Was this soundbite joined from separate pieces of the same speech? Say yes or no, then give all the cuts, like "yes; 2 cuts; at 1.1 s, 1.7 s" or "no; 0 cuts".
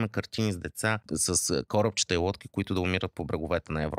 yes; 1 cut; at 1.0 s